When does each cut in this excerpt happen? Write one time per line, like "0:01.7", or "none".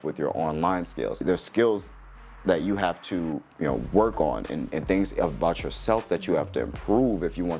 0:01.2